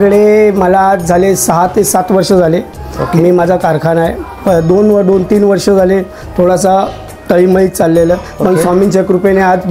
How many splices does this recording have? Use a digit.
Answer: 0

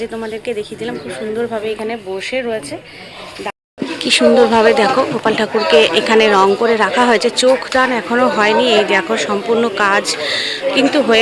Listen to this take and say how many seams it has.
1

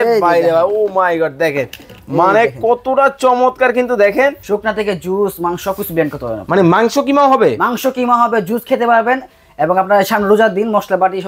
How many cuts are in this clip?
1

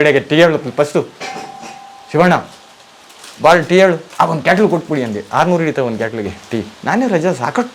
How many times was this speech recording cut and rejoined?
2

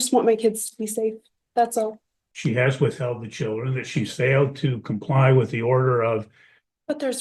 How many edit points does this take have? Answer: 1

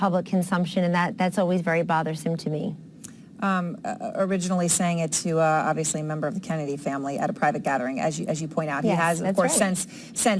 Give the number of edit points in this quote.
0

